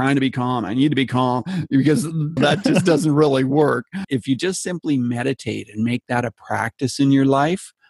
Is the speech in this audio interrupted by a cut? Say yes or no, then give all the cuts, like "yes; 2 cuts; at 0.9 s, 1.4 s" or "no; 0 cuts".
yes; 2 cuts; at 2.4 s, 4.0 s